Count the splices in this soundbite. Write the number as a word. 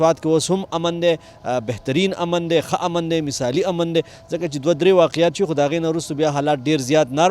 zero